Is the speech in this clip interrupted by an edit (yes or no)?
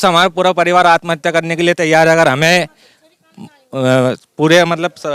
no